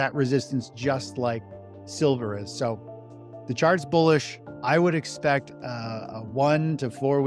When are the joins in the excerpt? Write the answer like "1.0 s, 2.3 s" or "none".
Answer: none